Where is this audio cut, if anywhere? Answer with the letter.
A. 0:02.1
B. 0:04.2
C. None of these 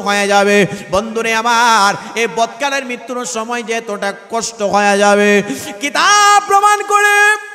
C